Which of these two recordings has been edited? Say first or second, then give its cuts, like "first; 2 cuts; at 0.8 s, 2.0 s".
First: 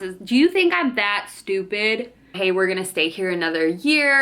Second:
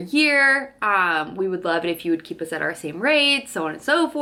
first; 1 cut; at 2.3 s